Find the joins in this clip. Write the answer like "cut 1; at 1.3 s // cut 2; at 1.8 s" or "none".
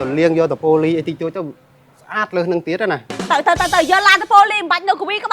cut 1; at 3.2 s